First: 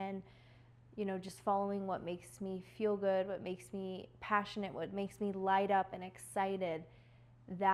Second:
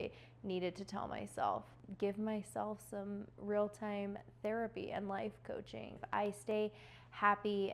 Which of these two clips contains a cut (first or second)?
second